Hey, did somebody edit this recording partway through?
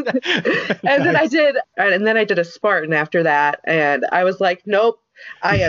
yes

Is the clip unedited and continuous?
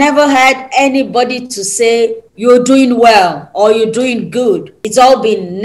no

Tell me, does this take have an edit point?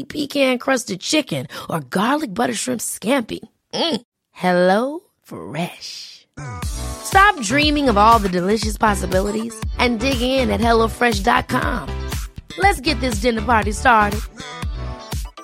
no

